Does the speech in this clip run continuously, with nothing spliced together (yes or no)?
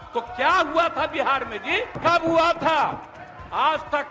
no